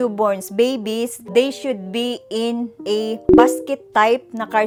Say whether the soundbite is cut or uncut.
uncut